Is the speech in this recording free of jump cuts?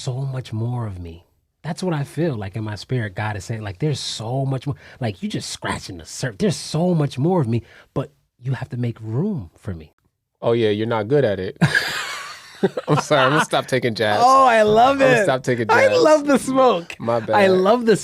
no; 1 cut; at 9.9 s

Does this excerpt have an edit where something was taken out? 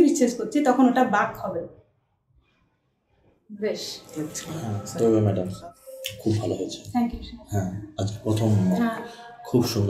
yes; 1 cut; at 4.5 s

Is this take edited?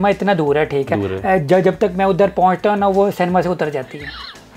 no; 0 cuts

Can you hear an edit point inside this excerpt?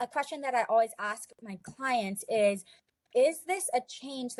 no; 0 cuts

